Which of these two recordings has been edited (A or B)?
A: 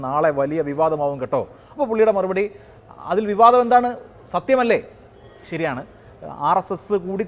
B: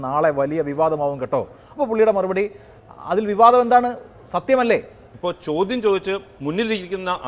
B